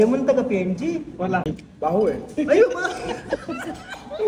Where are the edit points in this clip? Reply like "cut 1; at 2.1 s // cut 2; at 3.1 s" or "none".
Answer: cut 1; at 1.5 s

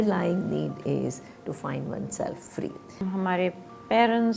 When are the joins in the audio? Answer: cut 1; at 3.0 s

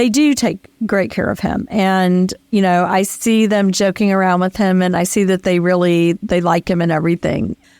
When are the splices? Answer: cut 1; at 6.2 s

